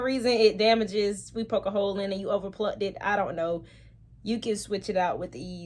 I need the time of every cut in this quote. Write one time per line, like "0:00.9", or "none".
none